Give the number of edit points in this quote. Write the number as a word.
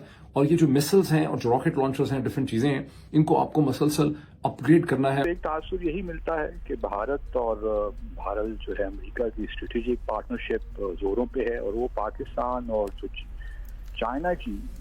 zero